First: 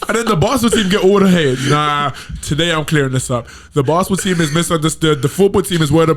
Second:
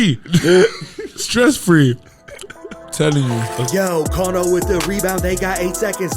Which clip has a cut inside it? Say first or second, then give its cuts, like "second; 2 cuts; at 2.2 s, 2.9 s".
second; 1 cut; at 3.5 s